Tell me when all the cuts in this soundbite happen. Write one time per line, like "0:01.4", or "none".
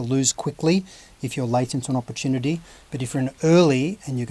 none